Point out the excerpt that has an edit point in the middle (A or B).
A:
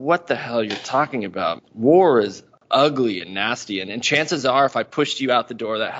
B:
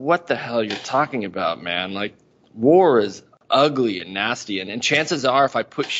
A